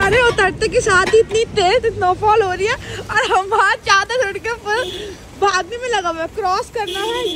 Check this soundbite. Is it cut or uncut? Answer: uncut